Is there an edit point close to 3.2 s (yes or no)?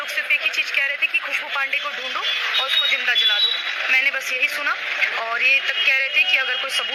no